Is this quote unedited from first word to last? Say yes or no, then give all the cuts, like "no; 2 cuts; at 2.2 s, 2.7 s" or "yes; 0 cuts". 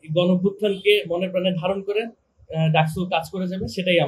yes; 0 cuts